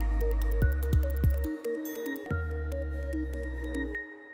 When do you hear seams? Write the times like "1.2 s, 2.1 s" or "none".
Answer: 2.2 s